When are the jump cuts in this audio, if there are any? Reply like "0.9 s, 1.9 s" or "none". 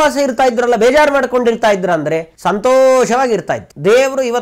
none